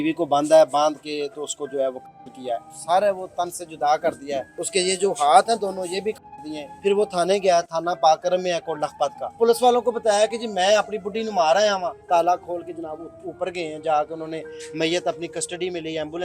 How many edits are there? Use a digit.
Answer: 5